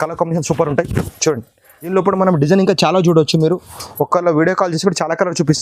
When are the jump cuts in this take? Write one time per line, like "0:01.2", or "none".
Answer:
0:01.9

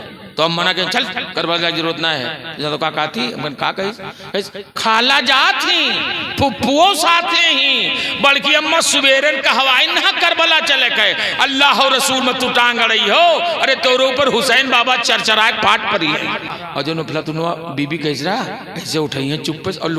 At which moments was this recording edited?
0:16.6

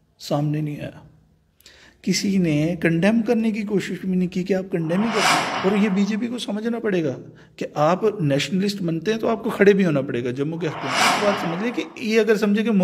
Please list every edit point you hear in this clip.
0:05.3
0:11.1

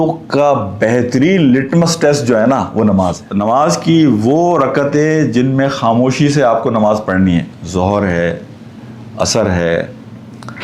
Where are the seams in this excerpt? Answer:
0:03.3

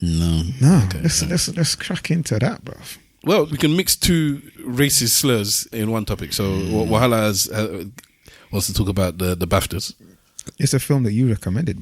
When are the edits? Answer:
0:03.5
0:04.5
0:05.7

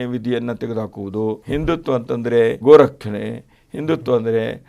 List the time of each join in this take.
0:01.4
0:02.6

